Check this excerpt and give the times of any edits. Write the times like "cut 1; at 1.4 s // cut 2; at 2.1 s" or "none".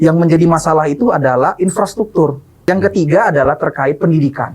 cut 1; at 2.6 s